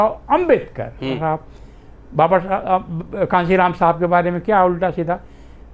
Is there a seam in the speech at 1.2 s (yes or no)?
yes